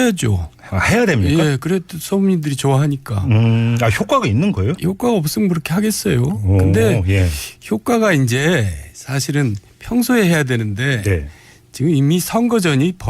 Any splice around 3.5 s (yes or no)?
no